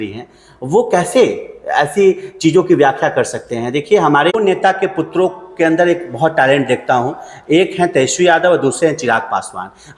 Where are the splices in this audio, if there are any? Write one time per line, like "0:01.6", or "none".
0:04.3